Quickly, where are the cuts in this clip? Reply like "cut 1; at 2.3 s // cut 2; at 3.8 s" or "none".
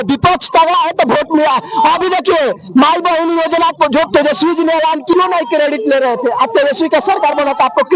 cut 1; at 5.1 s